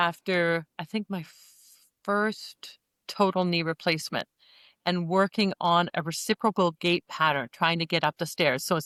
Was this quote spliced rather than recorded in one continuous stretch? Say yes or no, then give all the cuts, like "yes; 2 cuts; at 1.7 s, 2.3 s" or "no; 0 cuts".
no; 0 cuts